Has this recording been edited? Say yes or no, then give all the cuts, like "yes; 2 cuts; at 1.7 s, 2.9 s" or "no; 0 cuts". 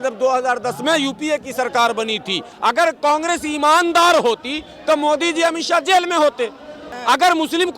yes; 2 cuts; at 2.5 s, 7.0 s